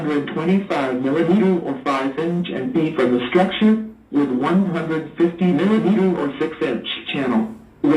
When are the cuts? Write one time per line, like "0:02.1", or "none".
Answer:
none